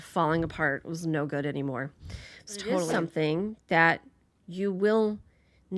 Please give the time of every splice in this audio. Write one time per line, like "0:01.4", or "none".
0:02.9